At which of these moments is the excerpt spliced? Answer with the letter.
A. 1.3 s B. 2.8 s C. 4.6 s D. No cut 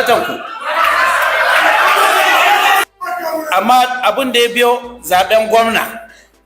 B